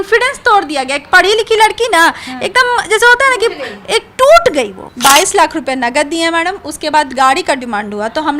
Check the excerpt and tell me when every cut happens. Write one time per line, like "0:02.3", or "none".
0:04.8